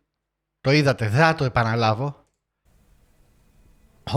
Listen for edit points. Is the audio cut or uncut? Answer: uncut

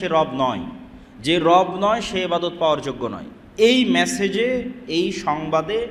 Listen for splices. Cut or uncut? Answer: uncut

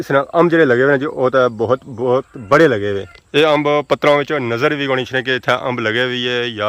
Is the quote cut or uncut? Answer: cut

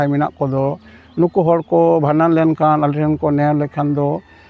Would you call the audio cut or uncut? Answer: uncut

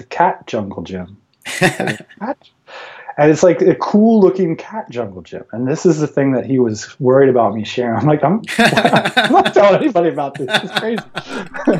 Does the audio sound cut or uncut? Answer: uncut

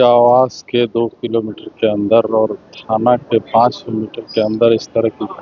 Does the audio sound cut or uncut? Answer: uncut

